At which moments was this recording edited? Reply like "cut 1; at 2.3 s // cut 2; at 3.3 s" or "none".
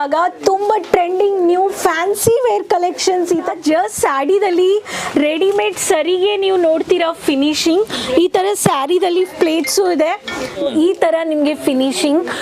cut 1; at 3.5 s // cut 2; at 10.5 s